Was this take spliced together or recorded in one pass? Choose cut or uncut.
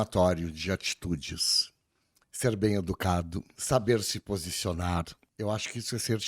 cut